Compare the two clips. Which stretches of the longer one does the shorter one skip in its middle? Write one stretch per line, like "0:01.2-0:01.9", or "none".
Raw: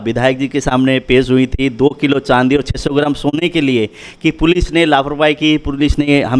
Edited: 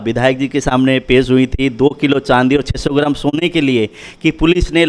none